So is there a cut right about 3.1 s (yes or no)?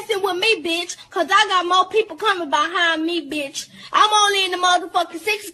no